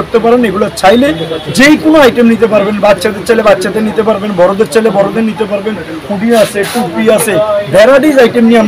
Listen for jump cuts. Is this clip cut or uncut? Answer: uncut